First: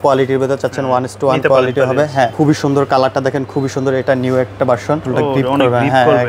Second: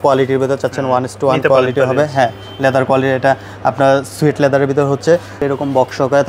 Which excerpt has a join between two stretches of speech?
first; 2 cuts; at 2.3 s, 5.1 s

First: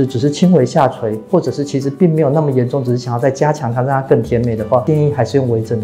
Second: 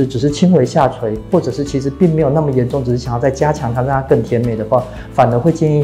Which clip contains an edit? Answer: first; 1 cut; at 4.8 s

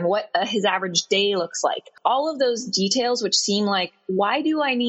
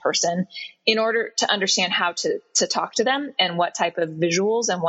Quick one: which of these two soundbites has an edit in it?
first; 1 cut; at 1.9 s

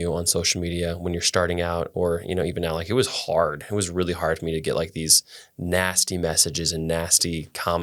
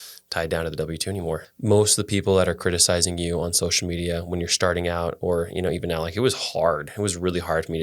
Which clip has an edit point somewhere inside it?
second; 1 cut; at 1.5 s

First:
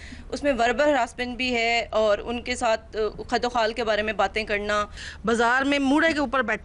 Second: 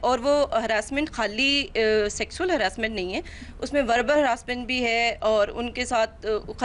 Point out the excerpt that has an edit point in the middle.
first; 1 cut; at 5.0 s

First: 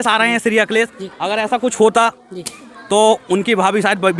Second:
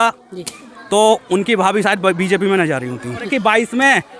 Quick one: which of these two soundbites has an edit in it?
second; 1 cut; at 3.3 s

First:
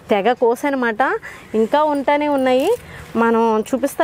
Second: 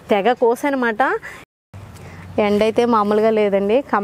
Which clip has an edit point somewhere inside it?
second; 1 cut; at 1.3 s

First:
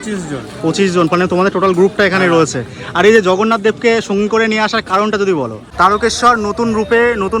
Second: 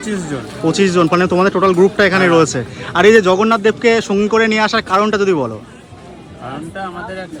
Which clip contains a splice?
first; 1 cut; at 5.6 s

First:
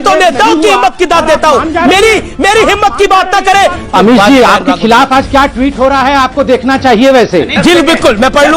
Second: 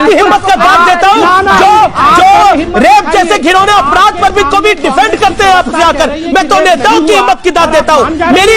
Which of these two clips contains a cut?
first; 2 cuts; at 3.9 s, 7.5 s

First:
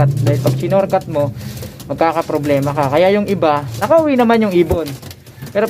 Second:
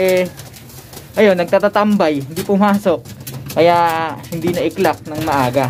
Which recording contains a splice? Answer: first; 1 cut; at 3.7 s

